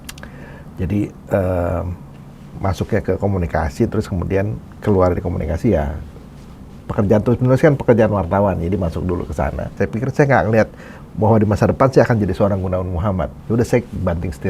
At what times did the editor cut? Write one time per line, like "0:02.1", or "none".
0:09.8